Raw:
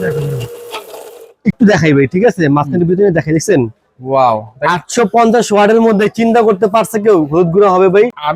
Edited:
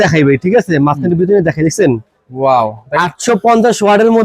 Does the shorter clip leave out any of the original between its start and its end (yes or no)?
no